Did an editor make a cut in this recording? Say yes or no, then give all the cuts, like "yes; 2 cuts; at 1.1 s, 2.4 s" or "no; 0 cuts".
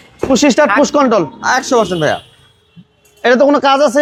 no; 0 cuts